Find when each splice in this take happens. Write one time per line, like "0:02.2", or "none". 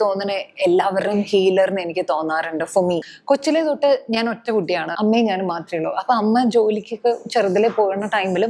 0:03.1
0:04.9